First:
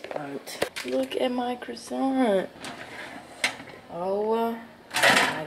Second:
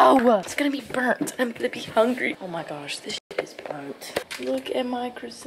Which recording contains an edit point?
second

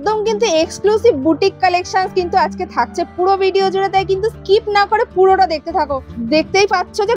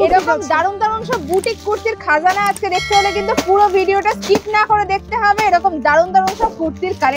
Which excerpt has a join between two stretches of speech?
first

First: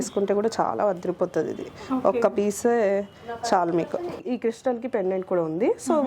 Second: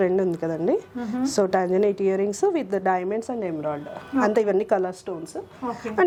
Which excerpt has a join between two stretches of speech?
first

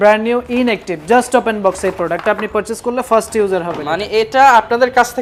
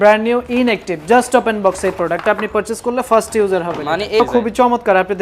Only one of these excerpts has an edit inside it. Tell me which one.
second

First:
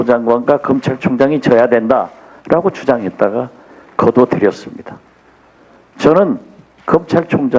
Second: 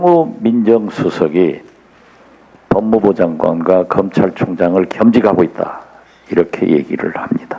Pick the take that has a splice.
first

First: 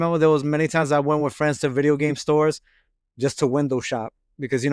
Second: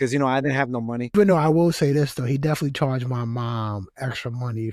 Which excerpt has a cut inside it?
second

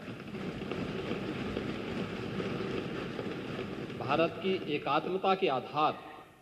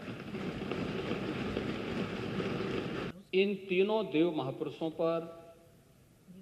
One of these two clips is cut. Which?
second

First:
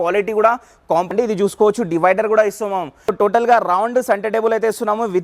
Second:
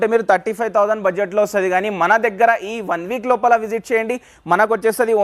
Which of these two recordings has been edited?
first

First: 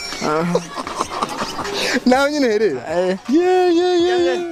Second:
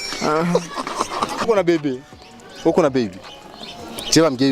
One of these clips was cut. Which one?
second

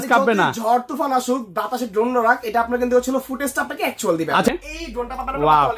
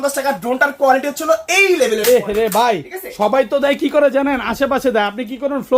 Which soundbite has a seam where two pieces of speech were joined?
first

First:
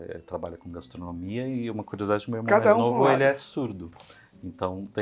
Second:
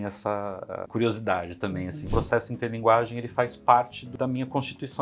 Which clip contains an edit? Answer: second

